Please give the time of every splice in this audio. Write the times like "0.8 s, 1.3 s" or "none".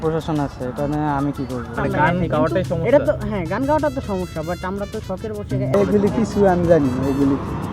1.7 s, 5.7 s